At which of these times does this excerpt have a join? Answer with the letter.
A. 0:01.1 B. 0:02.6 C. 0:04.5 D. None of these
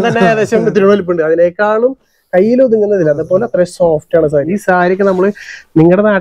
C